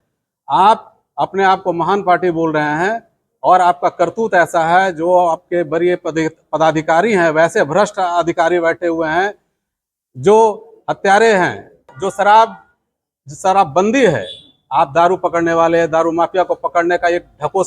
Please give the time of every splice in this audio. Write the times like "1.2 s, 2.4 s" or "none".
12.0 s